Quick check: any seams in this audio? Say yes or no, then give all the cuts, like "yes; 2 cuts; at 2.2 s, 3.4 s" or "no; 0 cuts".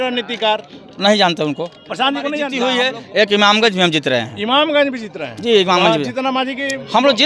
yes; 1 cut; at 2.5 s